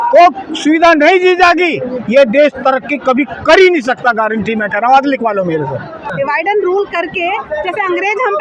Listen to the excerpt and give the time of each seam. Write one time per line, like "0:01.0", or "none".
0:06.1